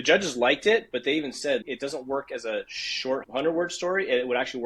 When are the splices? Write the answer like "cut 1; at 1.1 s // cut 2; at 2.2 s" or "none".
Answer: cut 1; at 1.6 s // cut 2; at 3.2 s